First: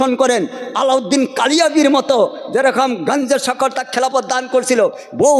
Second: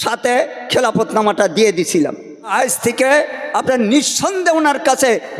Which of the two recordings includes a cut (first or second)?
second